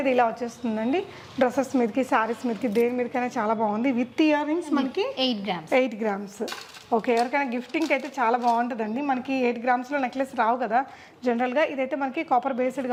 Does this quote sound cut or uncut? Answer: uncut